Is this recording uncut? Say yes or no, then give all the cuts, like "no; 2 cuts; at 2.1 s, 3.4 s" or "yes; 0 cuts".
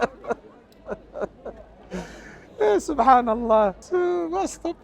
no; 1 cut; at 3.8 s